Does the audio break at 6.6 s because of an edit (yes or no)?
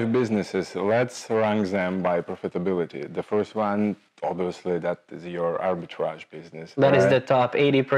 no